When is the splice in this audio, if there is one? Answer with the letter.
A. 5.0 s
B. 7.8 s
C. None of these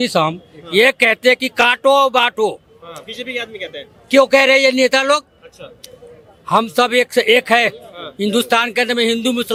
C